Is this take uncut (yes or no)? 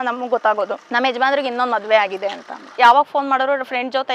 no